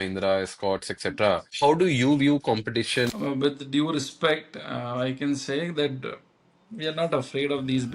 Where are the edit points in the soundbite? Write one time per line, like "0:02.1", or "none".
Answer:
0:01.5
0:03.1